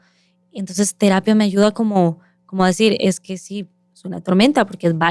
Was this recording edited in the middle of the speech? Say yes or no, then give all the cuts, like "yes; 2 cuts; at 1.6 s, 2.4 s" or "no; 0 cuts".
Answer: no; 0 cuts